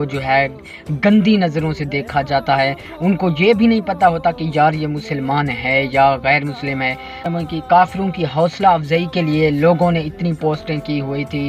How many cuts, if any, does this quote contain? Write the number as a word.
zero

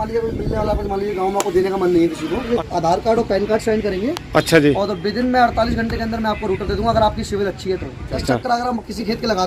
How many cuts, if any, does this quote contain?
two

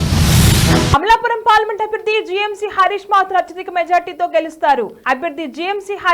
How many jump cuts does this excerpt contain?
one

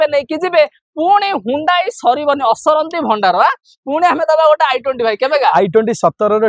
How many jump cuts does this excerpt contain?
zero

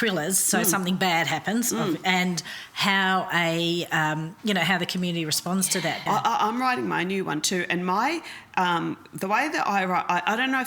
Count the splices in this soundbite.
one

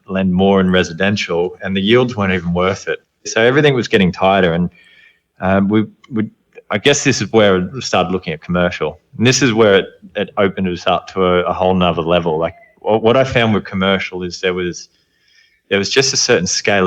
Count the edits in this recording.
one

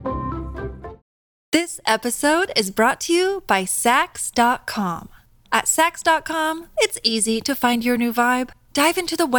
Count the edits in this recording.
one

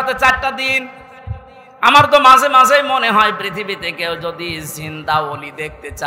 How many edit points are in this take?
zero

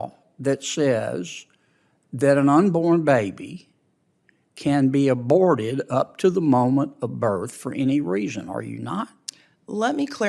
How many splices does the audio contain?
zero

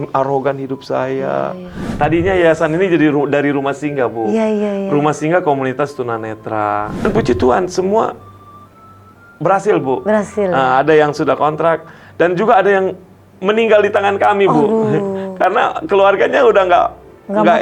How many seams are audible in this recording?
two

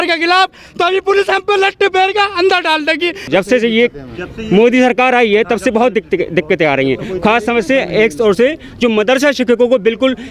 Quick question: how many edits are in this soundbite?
one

